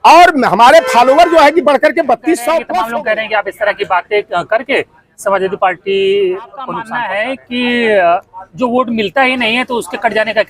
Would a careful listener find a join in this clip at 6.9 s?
yes; 2 cuts; at 2.8 s, 6.9 s

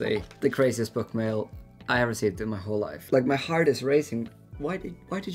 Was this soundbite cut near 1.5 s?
no; 1 cut; at 3.0 s

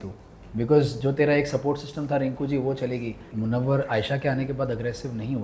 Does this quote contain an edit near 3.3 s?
yes; 1 cut; at 3.3 s

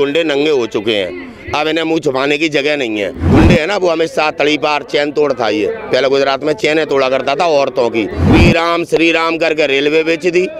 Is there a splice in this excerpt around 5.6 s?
no; 2 cuts; at 3.3 s, 8.3 s

